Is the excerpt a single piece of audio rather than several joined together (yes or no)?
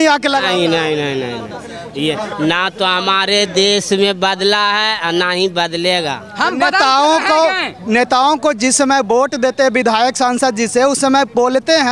yes